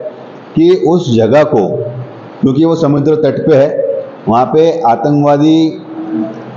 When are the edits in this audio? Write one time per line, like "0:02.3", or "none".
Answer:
none